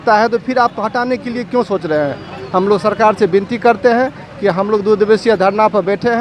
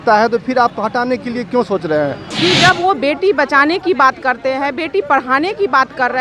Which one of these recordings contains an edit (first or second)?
second